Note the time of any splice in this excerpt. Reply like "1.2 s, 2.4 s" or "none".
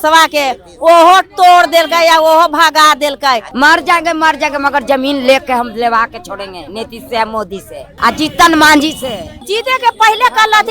3.5 s, 7.8 s, 9.3 s